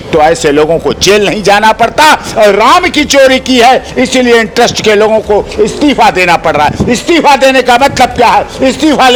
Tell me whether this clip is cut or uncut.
uncut